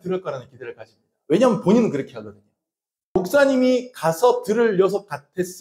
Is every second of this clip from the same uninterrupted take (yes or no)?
no